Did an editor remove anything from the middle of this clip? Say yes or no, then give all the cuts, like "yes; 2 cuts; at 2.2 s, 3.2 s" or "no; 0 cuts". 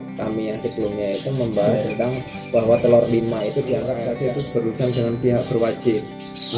yes; 1 cut; at 3.9 s